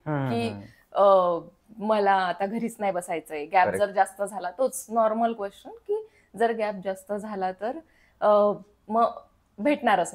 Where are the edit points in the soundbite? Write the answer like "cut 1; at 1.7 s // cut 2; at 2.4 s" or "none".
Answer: none